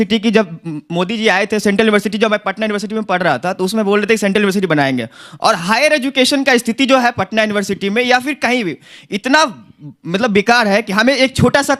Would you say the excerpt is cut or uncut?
uncut